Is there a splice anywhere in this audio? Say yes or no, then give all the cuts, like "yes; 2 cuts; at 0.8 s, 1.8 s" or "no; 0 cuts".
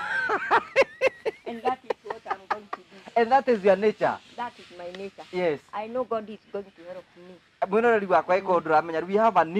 no; 0 cuts